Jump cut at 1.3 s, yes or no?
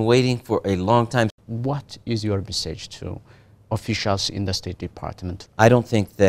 yes